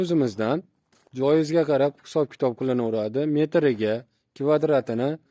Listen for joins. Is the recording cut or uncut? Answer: uncut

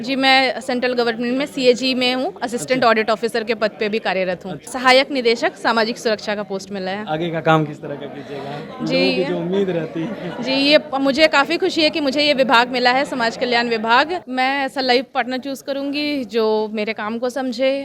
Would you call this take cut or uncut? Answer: cut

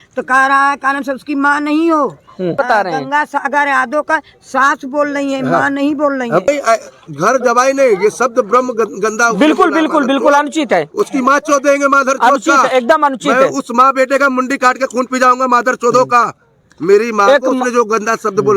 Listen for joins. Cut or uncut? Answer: cut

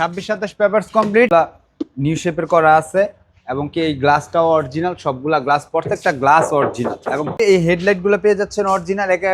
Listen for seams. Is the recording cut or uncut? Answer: cut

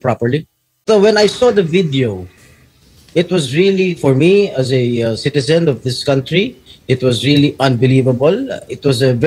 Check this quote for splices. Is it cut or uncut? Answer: cut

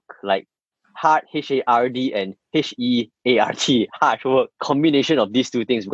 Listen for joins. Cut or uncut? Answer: uncut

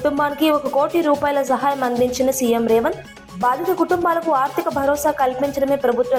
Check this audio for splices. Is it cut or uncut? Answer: uncut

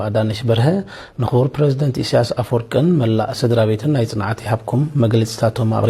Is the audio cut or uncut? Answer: uncut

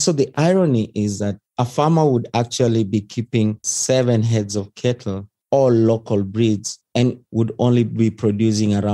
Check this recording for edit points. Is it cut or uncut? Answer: cut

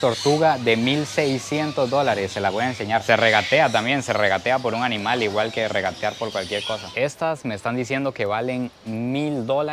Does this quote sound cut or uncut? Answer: cut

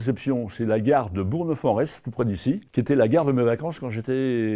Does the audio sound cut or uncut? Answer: uncut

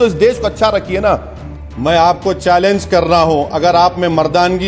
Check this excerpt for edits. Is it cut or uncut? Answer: cut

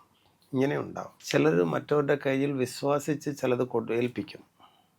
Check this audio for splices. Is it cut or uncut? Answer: cut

